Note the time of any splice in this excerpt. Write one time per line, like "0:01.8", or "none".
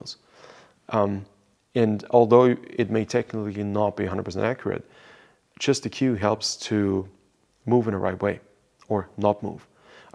none